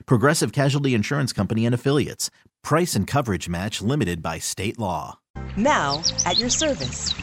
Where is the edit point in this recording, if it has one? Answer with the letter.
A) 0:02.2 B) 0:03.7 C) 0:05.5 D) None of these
C